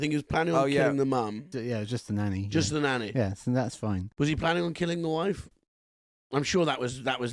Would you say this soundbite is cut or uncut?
cut